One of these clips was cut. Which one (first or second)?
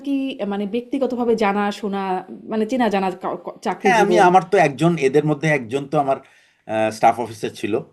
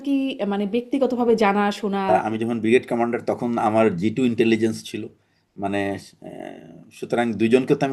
second